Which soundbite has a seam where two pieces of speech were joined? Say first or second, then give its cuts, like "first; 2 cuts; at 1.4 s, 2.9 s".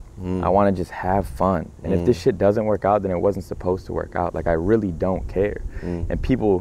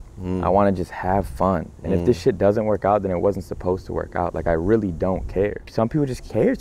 second; 1 cut; at 5.6 s